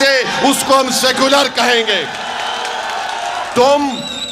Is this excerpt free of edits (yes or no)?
yes